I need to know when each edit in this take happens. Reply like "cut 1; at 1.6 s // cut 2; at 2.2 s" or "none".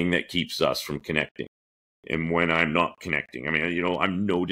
none